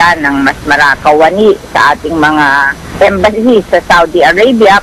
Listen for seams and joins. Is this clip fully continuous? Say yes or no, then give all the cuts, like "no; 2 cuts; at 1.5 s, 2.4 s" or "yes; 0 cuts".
no; 2 cuts; at 1.0 s, 2.8 s